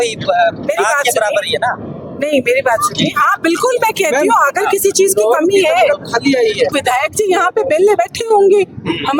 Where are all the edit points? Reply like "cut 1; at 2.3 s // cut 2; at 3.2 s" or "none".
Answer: cut 1; at 6.7 s